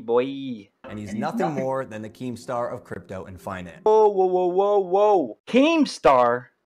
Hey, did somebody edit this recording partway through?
yes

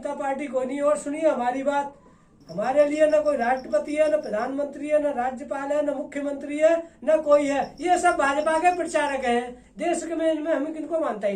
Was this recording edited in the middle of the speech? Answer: no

